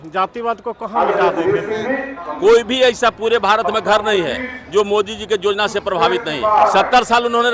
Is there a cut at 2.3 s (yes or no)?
yes